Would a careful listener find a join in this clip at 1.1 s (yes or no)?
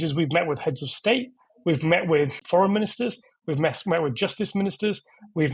no